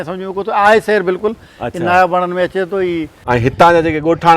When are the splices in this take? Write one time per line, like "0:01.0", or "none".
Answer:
0:03.1